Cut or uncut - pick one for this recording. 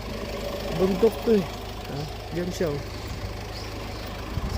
uncut